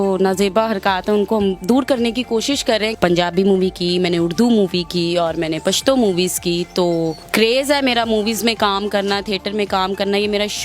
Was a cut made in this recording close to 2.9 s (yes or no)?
yes